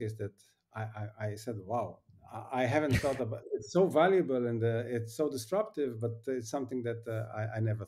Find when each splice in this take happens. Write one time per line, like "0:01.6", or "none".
none